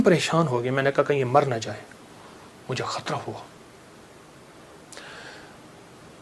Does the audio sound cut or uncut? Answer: uncut